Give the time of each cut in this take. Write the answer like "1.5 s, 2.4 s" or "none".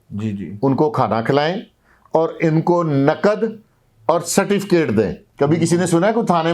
5.2 s